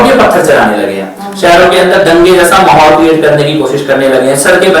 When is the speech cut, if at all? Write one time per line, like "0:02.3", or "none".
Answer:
none